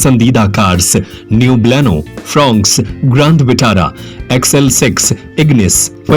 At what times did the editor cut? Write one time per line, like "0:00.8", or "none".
none